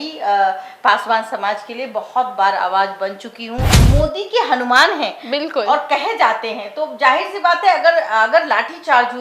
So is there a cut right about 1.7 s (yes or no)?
no